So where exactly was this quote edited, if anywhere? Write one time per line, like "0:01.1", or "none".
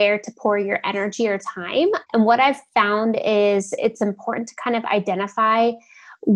0:02.0